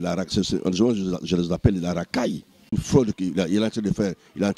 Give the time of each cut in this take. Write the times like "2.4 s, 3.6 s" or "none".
2.8 s